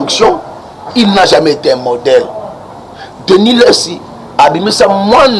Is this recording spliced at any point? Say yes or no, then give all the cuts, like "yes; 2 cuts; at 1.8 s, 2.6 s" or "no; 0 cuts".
no; 0 cuts